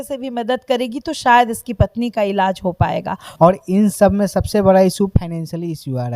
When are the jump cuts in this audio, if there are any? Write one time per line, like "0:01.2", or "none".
0:03.2